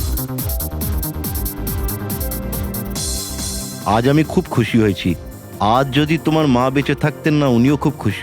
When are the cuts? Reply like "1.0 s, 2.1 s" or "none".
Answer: 3.8 s